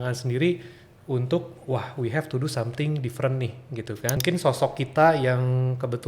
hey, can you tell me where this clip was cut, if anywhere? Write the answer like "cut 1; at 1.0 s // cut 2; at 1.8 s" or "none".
cut 1; at 4.2 s